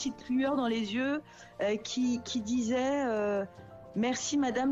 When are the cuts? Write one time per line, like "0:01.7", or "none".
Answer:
none